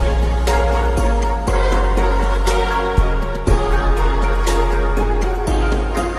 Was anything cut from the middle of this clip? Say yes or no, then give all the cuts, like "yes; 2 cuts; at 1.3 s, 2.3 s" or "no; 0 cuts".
no; 0 cuts